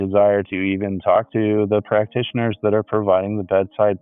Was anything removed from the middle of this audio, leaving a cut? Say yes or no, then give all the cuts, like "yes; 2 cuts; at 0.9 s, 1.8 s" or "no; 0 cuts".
no; 0 cuts